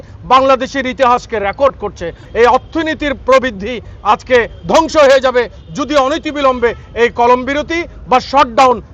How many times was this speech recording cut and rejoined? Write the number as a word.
one